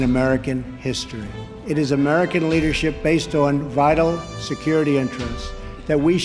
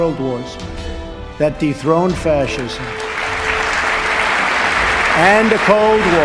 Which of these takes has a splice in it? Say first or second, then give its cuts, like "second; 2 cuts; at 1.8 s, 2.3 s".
first; 1 cut; at 4.3 s